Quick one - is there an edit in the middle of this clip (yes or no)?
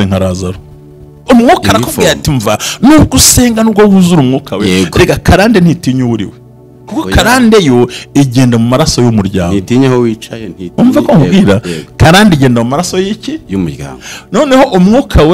yes